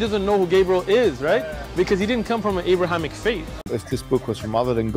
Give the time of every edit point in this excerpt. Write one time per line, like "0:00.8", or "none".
0:03.6